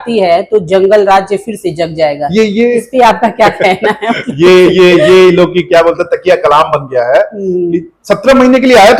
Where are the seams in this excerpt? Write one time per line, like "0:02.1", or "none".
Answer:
none